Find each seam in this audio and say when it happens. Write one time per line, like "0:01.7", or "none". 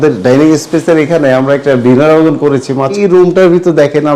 0:03.0